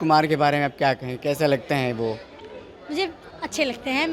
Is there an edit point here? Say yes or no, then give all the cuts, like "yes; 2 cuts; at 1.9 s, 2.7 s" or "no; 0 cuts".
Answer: no; 0 cuts